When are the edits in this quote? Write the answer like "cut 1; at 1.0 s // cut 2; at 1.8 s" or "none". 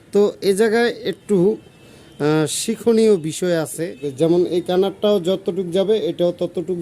cut 1; at 4.0 s